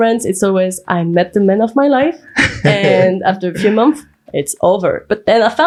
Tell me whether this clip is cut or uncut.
uncut